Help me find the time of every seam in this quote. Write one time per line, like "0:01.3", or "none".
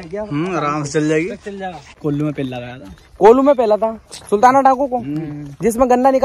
0:01.9